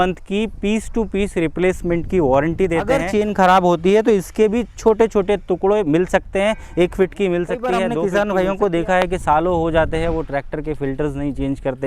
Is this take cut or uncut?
cut